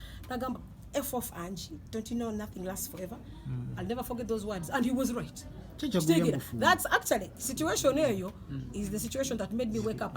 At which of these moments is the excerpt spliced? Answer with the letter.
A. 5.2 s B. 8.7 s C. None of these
C